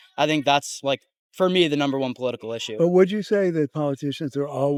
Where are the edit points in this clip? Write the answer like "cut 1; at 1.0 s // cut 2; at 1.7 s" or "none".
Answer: none